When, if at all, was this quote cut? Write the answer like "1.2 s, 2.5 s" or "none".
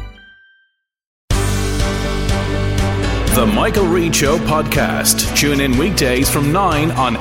1.1 s